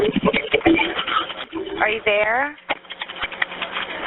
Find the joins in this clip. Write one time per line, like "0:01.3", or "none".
0:01.5